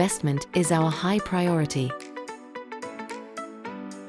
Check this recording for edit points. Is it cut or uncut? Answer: cut